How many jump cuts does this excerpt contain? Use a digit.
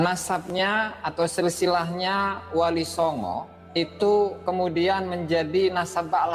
1